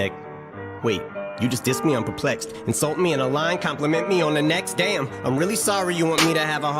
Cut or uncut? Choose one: uncut